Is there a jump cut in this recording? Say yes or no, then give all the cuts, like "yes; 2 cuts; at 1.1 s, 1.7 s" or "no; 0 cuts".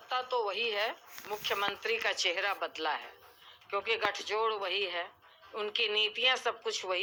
no; 0 cuts